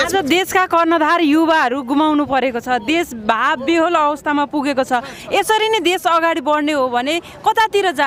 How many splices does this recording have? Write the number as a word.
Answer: zero